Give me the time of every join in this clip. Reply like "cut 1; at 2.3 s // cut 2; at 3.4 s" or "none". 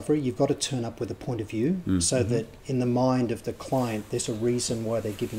none